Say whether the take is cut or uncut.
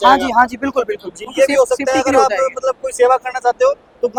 uncut